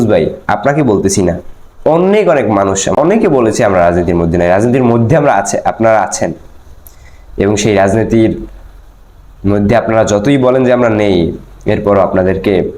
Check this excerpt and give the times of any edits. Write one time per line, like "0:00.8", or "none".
0:03.0